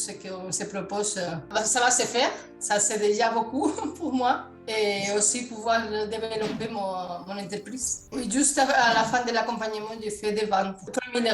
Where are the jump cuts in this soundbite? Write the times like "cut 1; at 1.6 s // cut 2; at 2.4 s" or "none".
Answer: cut 1; at 1.5 s // cut 2; at 2.5 s // cut 3; at 8.0 s

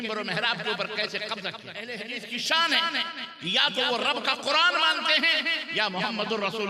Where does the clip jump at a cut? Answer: cut 1; at 1.7 s

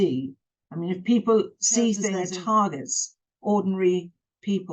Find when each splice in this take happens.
cut 1; at 2.2 s

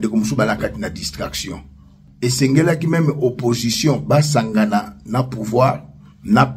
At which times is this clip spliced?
cut 1; at 2.0 s

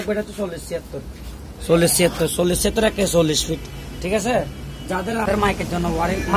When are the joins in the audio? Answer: cut 1; at 5.3 s

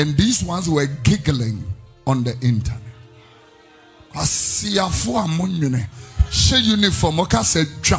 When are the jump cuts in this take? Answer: none

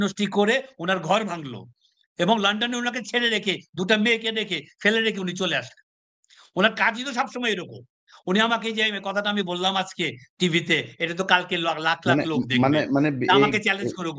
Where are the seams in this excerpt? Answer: none

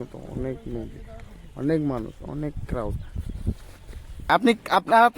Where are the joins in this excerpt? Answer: cut 1; at 4.2 s

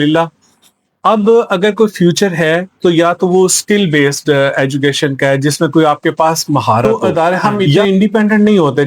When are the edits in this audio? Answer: cut 1; at 6.8 s

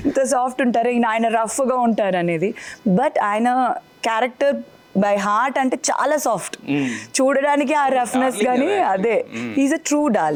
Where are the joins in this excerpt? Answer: none

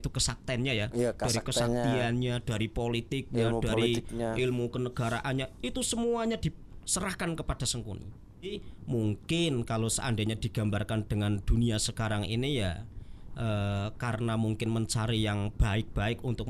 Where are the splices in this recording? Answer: cut 1; at 8.5 s

